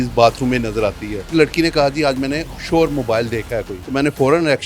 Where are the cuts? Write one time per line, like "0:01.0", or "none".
0:01.3
0:03.8